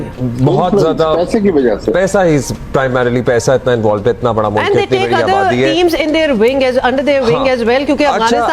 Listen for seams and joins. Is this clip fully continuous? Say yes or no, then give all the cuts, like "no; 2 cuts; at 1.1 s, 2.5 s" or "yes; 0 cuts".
yes; 0 cuts